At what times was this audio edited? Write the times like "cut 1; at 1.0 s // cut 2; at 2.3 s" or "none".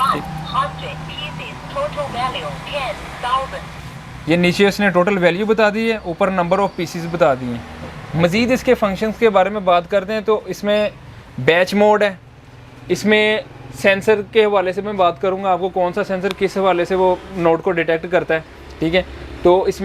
none